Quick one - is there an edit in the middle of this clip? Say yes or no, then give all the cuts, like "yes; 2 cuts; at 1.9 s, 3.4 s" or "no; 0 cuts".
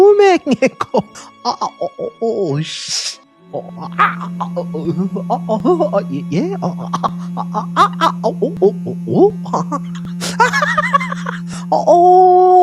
no; 0 cuts